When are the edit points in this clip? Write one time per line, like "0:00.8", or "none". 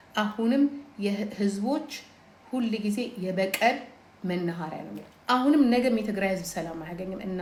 none